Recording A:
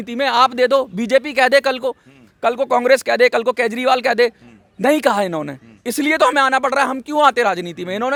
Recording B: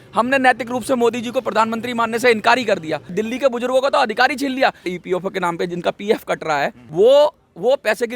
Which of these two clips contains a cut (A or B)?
B